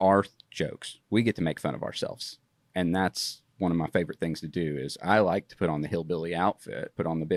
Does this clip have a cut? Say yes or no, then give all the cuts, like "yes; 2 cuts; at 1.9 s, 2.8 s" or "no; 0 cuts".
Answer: no; 0 cuts